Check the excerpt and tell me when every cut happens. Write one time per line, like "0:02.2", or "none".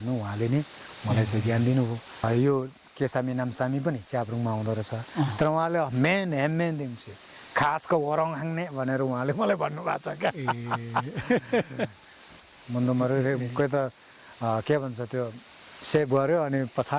0:02.2
0:12.2